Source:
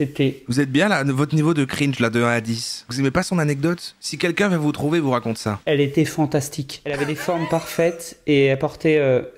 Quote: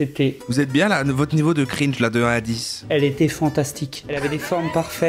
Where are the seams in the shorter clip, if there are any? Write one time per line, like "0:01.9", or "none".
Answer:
0:02.7